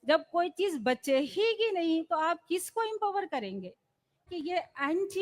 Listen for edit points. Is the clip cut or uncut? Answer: cut